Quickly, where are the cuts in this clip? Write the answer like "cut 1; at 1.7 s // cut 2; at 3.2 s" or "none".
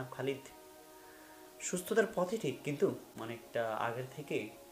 cut 1; at 3.1 s